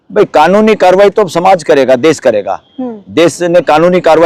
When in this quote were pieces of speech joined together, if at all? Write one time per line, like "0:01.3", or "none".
none